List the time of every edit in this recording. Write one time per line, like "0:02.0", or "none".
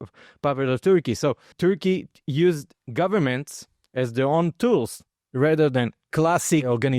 0:01.5
0:02.8